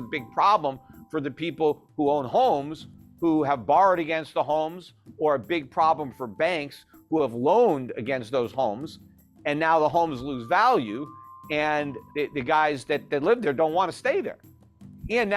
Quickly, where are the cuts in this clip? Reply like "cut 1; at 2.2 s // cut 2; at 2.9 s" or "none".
cut 1; at 12.0 s

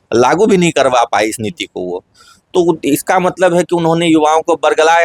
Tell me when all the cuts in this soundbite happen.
none

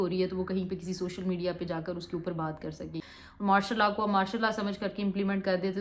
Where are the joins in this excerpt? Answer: cut 1; at 3.0 s

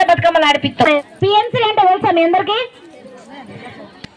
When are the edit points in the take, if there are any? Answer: cut 1; at 1.0 s

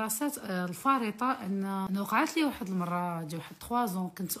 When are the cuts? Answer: cut 1; at 1.8 s

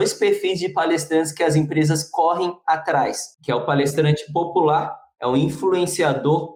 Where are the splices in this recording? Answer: none

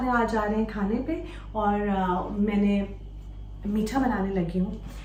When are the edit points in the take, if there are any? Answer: none

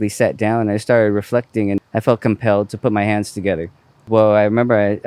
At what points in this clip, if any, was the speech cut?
cut 1; at 1.8 s // cut 2; at 4.1 s

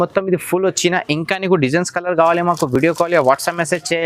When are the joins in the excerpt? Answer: none

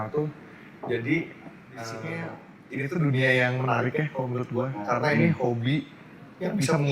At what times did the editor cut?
cut 1; at 2.2 s

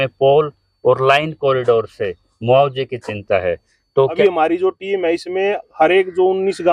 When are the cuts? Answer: cut 1; at 4.2 s

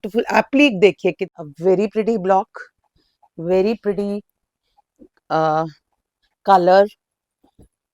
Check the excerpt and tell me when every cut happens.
cut 1; at 1.3 s

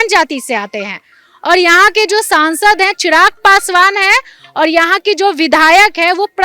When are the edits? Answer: none

